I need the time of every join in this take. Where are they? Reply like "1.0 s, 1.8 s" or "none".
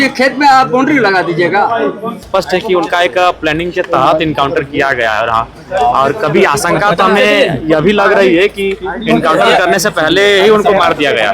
2.2 s